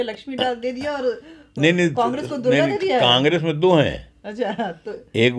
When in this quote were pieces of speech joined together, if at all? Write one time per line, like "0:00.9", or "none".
none

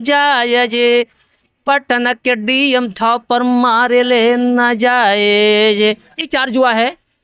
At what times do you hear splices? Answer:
0:06.3

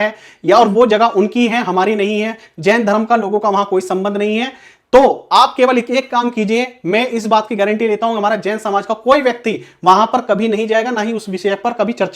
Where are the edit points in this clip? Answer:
none

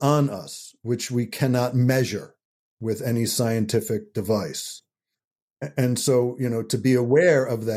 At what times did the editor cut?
none

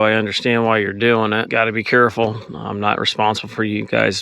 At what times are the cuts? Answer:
0:01.5

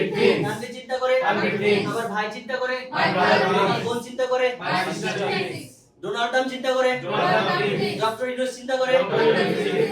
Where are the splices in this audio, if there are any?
none

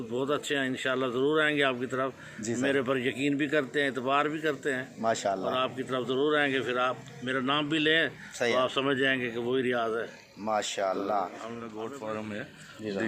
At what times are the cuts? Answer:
0:11.8

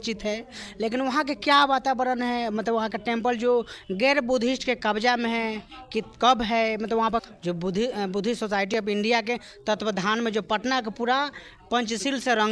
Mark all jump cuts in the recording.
0:07.3

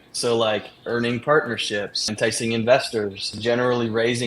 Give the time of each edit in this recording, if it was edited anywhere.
0:02.1
0:03.3

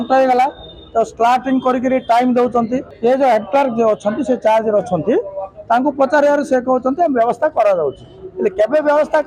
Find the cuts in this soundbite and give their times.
0:02.8

